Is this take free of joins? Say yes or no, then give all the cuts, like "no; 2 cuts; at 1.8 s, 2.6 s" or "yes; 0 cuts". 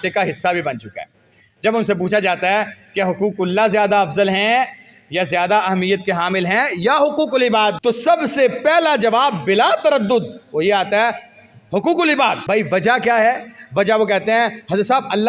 no; 2 cuts; at 7.8 s, 12.4 s